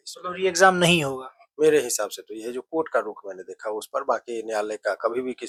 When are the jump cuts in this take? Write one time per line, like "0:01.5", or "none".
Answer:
none